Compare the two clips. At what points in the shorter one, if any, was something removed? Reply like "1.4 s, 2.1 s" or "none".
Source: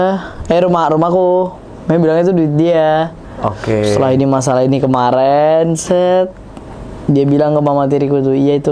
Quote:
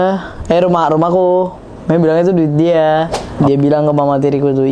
3.2 s